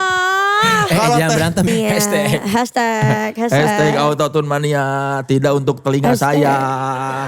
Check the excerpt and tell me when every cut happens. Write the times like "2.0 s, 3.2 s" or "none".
1.7 s